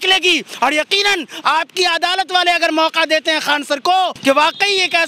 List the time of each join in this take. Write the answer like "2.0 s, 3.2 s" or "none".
4.2 s

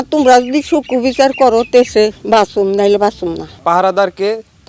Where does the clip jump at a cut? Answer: 3.5 s

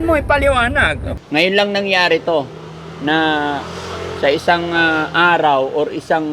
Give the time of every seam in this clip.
1.1 s

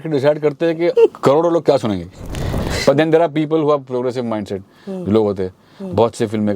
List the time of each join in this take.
0.9 s, 2.5 s

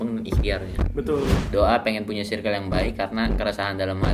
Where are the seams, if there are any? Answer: 1.4 s

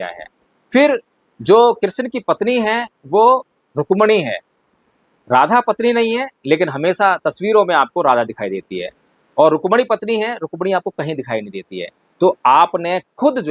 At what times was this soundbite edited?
none

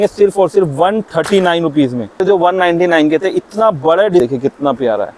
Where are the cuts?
2.2 s, 4.2 s

